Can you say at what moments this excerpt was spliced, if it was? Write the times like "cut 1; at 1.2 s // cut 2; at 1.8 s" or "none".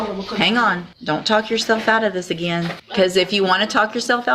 cut 1; at 0.9 s // cut 2; at 2.8 s